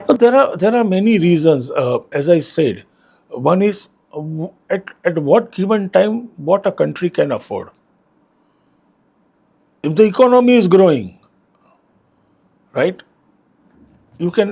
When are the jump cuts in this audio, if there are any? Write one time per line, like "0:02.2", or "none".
none

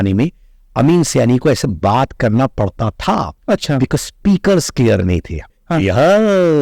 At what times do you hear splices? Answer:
0:05.5

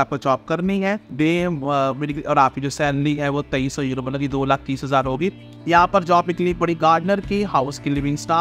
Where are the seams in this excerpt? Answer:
0:01.1
0:05.5

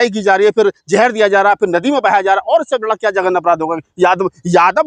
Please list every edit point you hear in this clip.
none

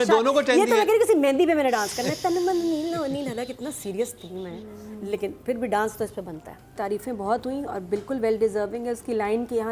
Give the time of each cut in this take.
0:06.7

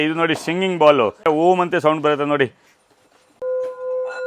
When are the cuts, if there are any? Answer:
0:01.2
0:03.4

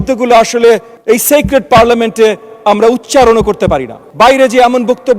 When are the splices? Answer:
0:00.9
0:04.0

